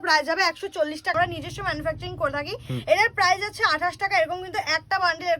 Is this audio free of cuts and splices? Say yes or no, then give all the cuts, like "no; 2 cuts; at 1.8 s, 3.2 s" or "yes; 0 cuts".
no; 1 cut; at 1.1 s